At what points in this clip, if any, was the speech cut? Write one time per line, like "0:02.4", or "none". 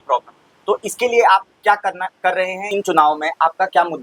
0:02.7